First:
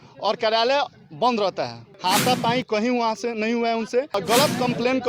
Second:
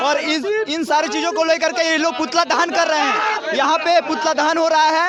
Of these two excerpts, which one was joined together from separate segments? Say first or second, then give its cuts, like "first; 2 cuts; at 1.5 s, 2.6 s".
first; 2 cuts; at 1.8 s, 4.2 s